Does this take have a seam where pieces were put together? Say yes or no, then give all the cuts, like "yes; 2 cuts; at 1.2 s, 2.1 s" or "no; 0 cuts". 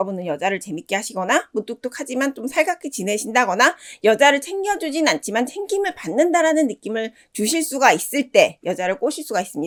no; 0 cuts